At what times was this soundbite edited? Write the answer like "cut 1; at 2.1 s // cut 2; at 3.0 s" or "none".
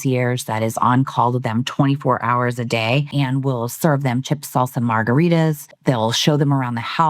cut 1; at 3.1 s // cut 2; at 5.7 s